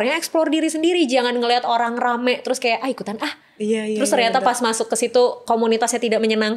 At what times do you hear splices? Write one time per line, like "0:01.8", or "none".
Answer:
none